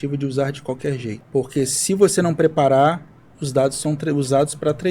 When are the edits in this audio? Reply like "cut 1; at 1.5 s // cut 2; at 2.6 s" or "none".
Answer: cut 1; at 1.2 s